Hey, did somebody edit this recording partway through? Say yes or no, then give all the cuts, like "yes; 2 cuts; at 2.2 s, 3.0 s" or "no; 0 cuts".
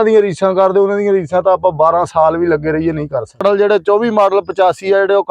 yes; 1 cut; at 3.4 s